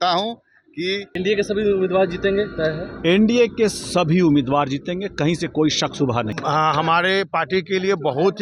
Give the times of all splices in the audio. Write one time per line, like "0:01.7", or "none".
0:01.1
0:06.3

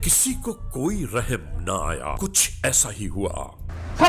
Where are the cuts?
0:02.2

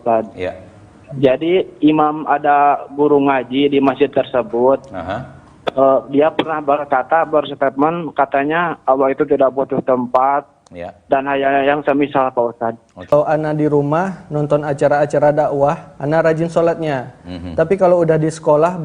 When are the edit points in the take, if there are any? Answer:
0:13.1

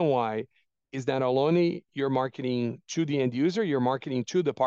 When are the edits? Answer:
none

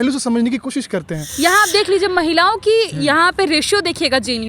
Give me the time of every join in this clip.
0:01.2

